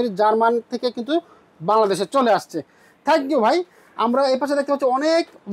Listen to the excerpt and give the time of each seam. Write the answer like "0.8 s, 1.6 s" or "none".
none